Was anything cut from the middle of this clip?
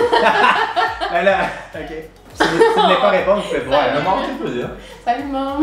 no; 0 cuts

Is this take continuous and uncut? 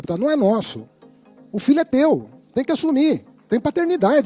yes; 0 cuts

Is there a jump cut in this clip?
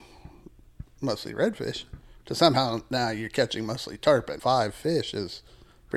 yes; 1 cut; at 4.3 s

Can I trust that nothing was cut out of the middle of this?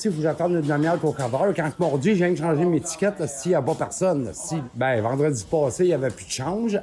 no; 1 cut; at 4.6 s

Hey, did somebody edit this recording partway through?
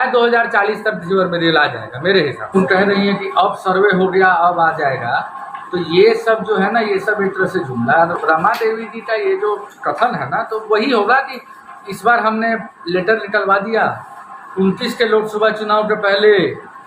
yes; 2 cuts; at 2.5 s, 8.2 s

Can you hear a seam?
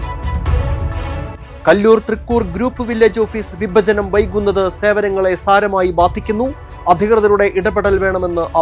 yes; 1 cut; at 1.4 s

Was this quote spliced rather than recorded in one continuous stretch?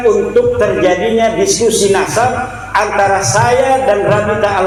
no; 0 cuts

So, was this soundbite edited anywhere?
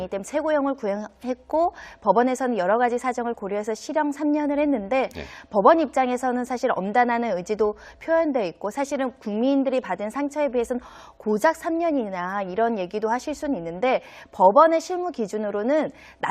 no; 0 cuts

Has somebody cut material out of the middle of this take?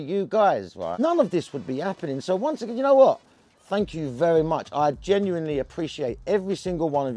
yes; 1 cut; at 1.0 s

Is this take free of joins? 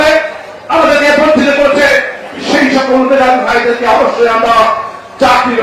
yes; 0 cuts

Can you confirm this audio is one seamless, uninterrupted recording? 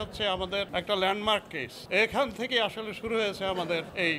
no; 1 cut; at 1.7 s

